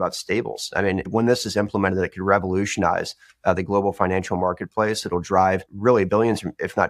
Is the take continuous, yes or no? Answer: no